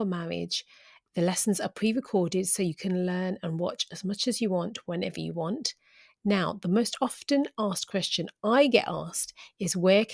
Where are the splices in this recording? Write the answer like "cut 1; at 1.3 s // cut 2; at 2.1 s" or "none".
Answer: none